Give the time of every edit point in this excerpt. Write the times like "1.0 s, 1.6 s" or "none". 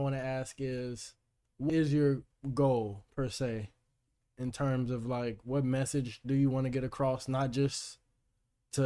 1.7 s